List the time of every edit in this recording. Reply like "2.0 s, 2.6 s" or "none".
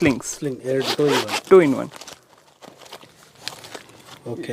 none